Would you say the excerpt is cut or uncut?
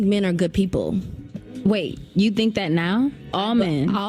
uncut